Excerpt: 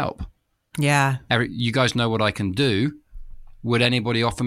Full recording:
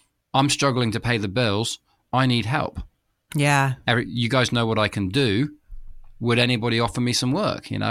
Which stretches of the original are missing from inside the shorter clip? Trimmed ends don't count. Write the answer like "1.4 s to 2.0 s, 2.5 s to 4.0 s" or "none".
none